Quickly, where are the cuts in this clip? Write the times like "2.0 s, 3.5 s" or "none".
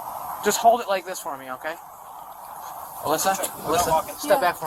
none